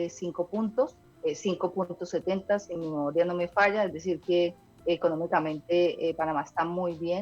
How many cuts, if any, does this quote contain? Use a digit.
3